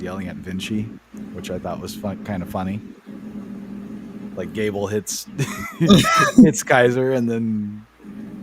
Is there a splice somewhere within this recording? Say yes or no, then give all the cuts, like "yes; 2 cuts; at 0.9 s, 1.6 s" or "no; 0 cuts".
no; 0 cuts